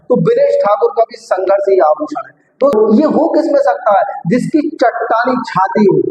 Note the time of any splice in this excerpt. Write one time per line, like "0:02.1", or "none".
0:02.7